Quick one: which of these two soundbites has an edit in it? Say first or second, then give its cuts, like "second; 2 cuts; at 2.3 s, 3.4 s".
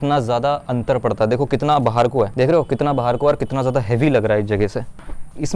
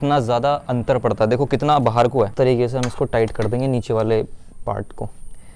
second; 1 cut; at 2.3 s